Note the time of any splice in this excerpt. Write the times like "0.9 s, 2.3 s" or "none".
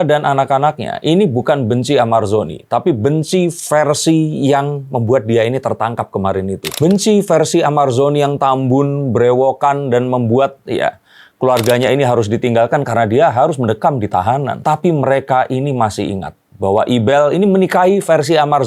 none